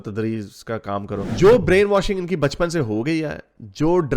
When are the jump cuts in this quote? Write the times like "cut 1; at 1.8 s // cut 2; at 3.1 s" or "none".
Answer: cut 1; at 1.3 s